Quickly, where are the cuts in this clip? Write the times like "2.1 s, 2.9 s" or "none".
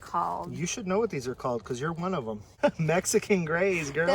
2.5 s